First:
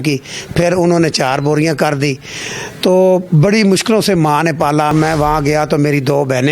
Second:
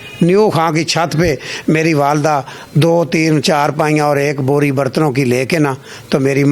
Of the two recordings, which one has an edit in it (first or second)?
first